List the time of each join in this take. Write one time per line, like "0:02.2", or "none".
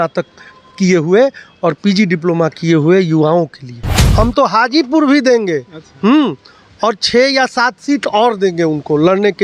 0:04.0